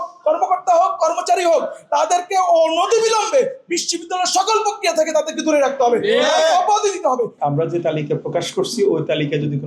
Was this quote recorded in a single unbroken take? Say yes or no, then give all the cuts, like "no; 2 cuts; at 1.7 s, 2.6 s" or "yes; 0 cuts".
no; 1 cut; at 7.3 s